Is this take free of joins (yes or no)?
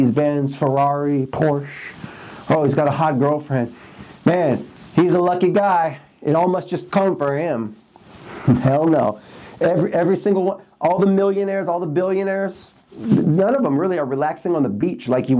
yes